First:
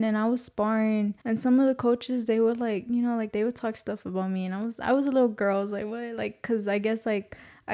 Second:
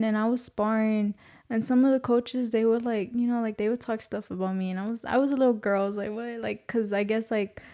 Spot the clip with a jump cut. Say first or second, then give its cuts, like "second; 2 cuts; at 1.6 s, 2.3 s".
first; 1 cut; at 1.2 s